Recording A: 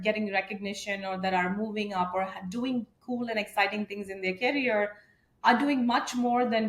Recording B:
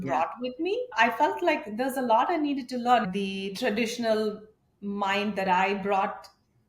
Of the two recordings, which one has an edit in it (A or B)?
B